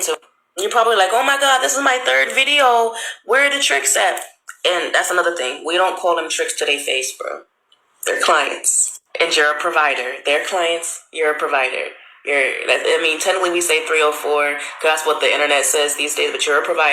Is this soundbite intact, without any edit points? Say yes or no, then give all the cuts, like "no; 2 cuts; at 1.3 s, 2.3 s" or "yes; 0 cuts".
no; 1 cut; at 9.5 s